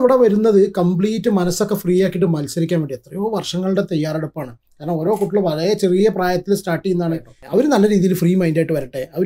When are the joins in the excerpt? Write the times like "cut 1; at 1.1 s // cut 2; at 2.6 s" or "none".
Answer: cut 1; at 7.3 s